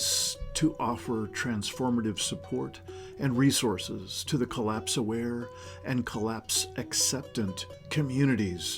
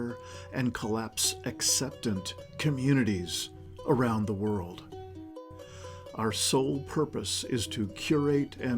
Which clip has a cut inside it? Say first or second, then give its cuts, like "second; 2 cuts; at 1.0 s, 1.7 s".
second; 2 cuts; at 4.8 s, 6.1 s